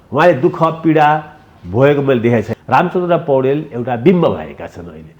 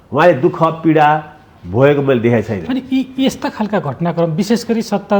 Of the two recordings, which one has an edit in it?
first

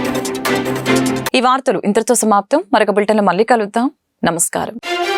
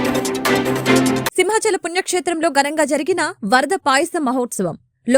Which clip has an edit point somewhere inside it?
second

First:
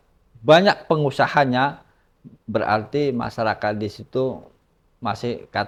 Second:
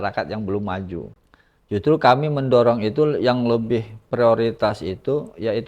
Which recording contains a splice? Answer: second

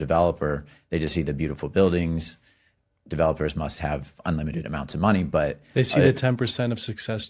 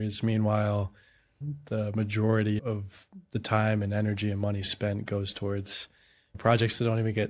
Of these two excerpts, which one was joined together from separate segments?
second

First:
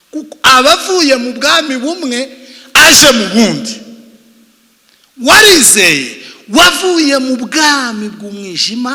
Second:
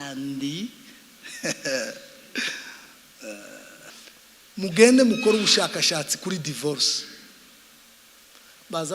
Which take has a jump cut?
second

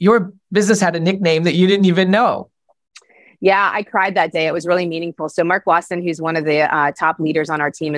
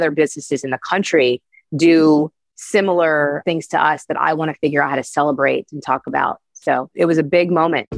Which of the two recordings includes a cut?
second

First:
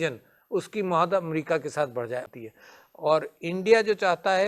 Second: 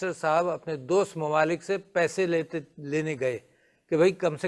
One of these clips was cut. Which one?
first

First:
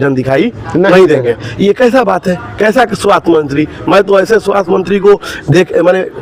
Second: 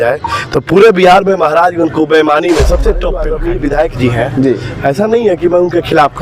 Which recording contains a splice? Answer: second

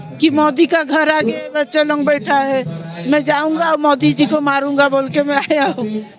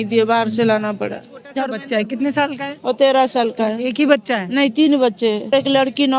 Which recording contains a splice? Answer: second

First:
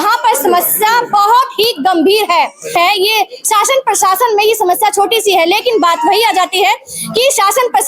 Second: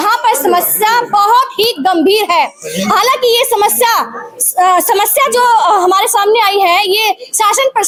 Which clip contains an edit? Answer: first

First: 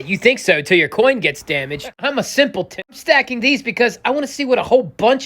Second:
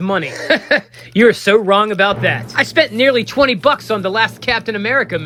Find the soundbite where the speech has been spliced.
first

